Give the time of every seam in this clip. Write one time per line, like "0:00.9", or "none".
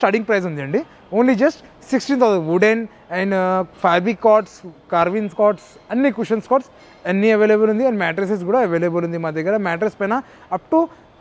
none